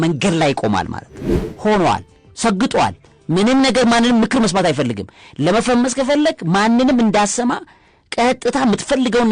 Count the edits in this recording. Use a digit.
1